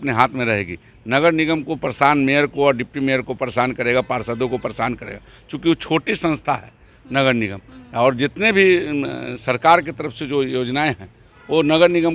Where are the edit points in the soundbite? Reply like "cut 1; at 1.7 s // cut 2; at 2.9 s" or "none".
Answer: none